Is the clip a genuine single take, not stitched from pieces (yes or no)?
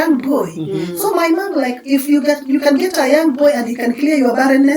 yes